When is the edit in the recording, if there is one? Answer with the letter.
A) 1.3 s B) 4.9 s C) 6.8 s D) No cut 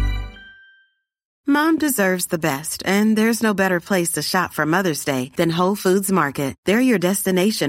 A